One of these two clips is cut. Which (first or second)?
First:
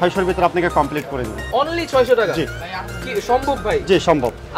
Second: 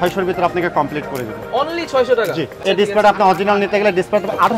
second